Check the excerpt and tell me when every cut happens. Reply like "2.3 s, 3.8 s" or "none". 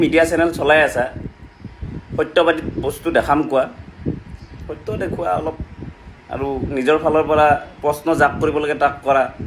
none